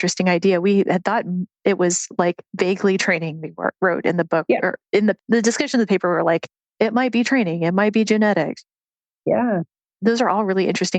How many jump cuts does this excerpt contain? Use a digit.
2